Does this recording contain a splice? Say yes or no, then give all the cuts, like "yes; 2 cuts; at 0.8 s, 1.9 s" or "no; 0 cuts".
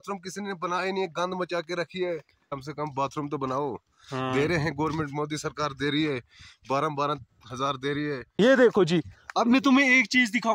yes; 2 cuts; at 2.5 s, 8.3 s